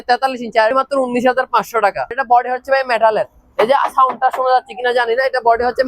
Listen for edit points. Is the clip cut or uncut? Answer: cut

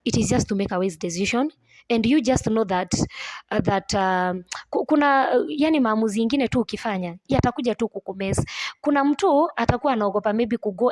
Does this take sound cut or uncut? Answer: uncut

